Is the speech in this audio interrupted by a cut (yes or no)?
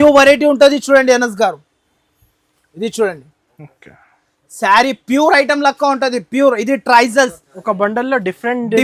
no